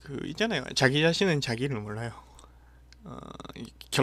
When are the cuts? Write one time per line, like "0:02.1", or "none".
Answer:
0:01.0